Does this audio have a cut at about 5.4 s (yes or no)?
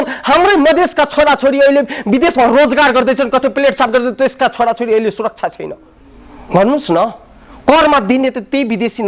no